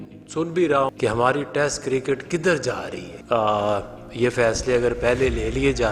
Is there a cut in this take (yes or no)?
yes